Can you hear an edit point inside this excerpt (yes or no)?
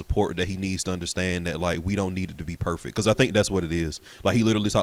no